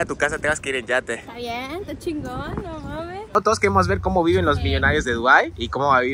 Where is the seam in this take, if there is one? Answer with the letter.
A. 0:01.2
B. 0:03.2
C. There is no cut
B